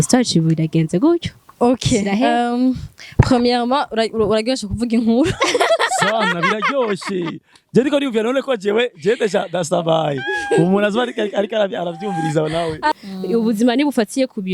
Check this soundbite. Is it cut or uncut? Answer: cut